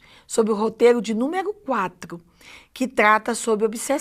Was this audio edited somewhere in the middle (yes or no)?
yes